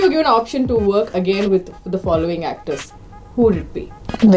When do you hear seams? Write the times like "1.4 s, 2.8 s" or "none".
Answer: 2.8 s